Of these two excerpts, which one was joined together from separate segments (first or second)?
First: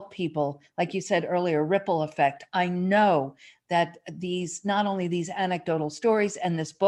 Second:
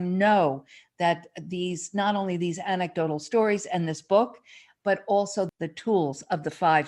second